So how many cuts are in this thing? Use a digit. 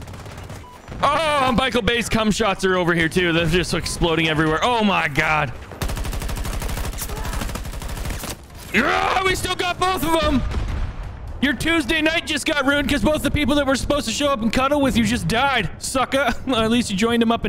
1